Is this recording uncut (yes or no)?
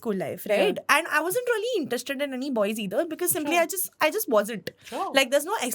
yes